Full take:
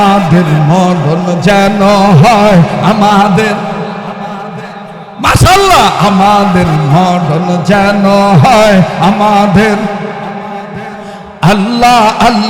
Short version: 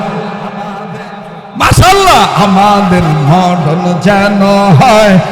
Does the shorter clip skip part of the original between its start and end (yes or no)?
no